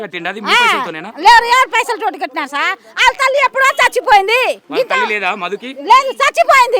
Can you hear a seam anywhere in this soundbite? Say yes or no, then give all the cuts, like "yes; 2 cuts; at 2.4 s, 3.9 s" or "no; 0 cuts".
yes; 1 cut; at 4.6 s